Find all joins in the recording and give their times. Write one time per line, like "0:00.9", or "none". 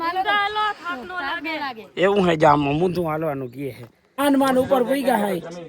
0:04.1

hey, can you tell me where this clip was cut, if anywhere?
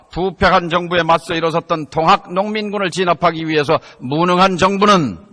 0:02.7

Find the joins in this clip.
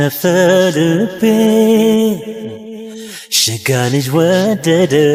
none

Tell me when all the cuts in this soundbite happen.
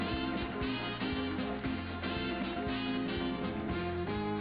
none

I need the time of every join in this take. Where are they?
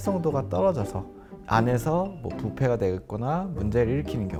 none

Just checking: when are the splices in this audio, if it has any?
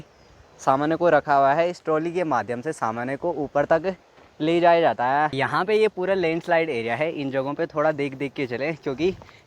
0:05.3

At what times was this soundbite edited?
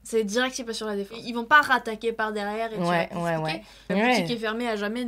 0:01.3
0:03.9

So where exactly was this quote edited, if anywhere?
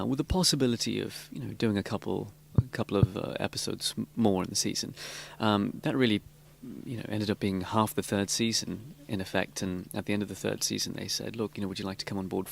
0:01.1

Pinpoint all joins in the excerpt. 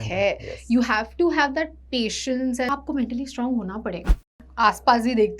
0:02.6
0:04.2

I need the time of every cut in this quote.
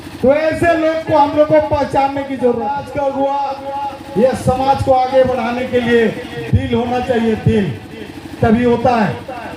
0:02.8

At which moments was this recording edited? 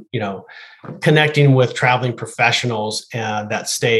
none

